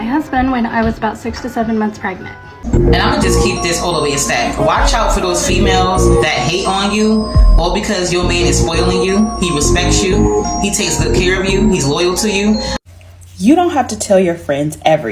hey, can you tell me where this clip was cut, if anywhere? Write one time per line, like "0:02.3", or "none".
0:02.5
0:12.8